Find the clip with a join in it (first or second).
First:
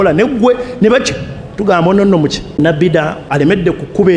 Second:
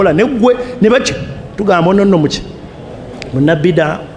first